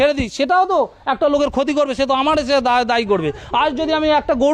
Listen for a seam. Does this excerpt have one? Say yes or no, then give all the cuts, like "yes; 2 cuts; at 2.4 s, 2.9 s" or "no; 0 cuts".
no; 0 cuts